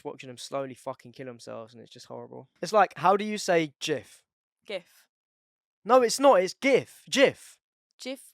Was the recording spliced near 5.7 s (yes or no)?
no